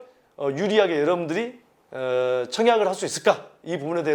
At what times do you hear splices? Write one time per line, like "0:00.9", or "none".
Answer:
none